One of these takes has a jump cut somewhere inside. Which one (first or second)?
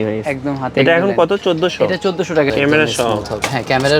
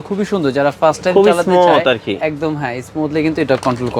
first